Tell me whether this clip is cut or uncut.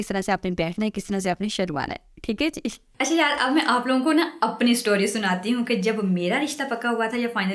uncut